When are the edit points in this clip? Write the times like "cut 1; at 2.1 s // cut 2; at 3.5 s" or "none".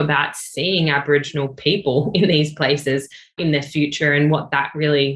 none